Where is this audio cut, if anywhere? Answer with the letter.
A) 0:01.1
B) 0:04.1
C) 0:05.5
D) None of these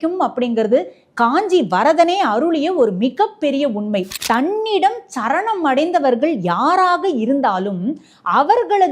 B